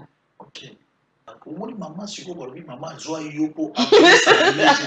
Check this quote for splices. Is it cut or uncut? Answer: cut